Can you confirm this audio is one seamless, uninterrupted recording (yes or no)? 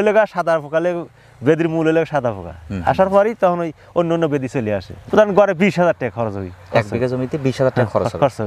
no